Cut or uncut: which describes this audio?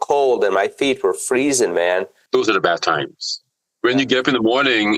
cut